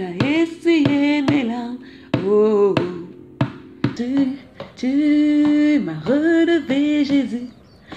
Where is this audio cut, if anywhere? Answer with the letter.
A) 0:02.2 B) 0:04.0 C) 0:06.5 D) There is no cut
B